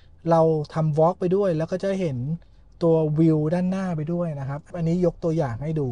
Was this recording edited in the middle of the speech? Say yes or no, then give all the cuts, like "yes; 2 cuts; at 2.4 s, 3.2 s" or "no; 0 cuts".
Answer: yes; 1 cut; at 4.7 s